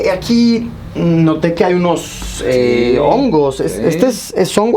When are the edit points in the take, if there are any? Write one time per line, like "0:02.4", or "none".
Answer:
none